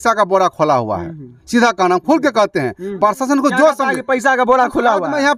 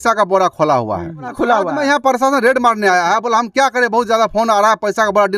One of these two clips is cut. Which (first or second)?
second